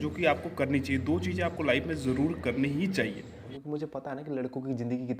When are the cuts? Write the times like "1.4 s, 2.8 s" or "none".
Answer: 3.4 s